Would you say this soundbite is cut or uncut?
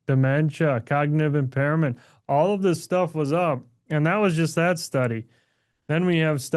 uncut